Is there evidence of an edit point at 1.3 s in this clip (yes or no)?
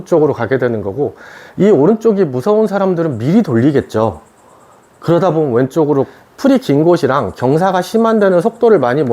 no